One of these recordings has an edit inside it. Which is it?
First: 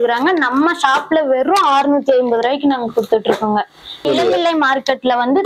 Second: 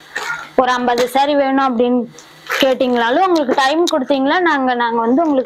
first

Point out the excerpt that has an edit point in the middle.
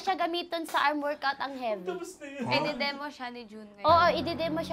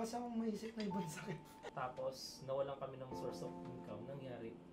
second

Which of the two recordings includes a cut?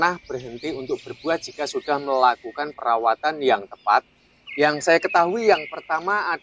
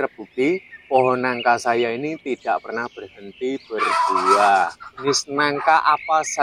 second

